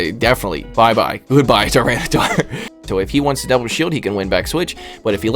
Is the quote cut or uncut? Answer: cut